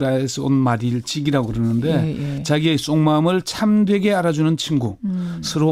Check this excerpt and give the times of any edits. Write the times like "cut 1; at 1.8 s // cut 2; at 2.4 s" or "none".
none